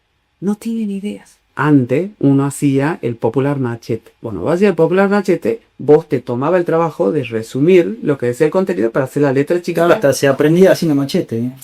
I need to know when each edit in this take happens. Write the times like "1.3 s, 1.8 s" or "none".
1.5 s